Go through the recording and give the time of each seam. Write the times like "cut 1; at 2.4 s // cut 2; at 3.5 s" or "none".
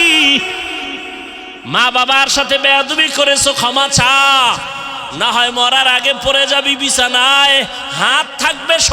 cut 1; at 1.5 s